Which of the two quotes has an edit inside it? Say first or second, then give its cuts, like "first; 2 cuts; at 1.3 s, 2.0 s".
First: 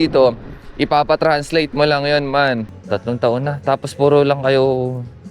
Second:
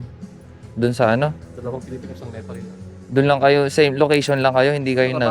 first; 1 cut; at 2.7 s